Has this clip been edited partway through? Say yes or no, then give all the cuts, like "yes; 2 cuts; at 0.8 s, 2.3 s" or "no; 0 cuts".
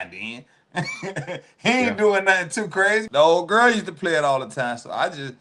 yes; 1 cut; at 3.1 s